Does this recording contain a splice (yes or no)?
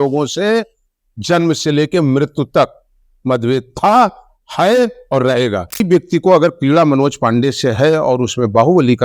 yes